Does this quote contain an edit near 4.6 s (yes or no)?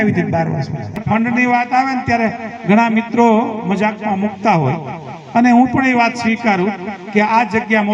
no